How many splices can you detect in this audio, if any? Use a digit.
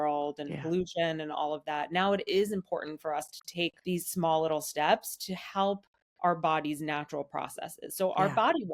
1